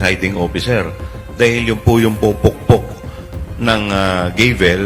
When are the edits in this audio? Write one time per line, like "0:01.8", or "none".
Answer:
none